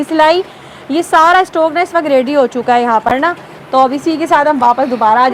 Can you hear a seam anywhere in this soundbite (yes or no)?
no